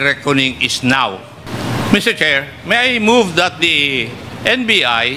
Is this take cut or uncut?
cut